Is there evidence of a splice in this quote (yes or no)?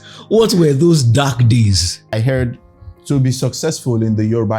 yes